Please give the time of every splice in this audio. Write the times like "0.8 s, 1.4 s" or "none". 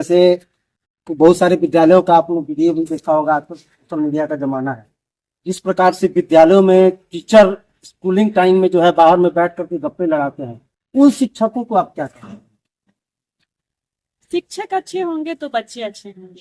none